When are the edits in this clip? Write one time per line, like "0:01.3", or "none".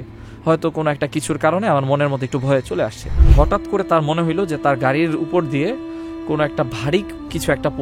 0:03.2